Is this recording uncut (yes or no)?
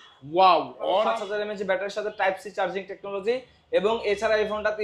no